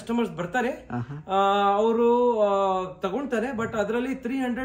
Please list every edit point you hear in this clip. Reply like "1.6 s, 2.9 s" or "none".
none